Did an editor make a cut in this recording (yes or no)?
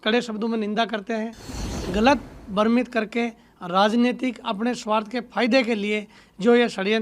yes